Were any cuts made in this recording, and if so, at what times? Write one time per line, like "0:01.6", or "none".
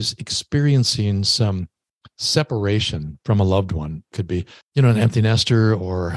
0:04.2